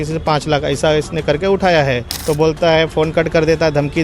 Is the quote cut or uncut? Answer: cut